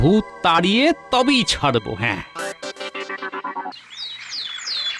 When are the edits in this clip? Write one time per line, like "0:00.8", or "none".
0:03.7